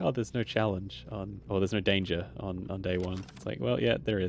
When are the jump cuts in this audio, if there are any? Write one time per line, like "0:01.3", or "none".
0:01.3